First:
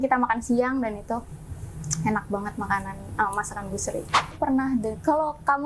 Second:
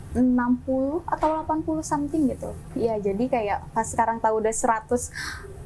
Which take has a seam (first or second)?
first